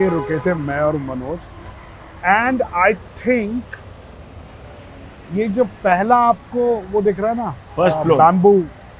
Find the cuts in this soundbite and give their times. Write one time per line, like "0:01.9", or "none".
none